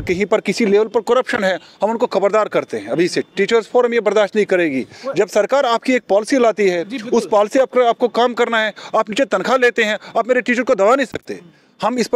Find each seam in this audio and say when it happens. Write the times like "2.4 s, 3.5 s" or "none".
none